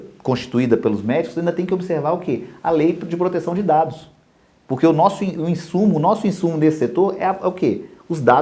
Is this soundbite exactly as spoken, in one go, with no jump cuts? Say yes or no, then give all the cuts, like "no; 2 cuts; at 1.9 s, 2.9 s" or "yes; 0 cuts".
yes; 0 cuts